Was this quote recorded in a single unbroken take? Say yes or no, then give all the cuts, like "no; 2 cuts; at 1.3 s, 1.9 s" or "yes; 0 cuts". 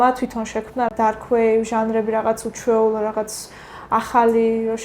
no; 1 cut; at 0.9 s